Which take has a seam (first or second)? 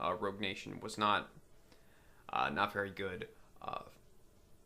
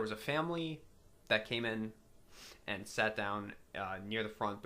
second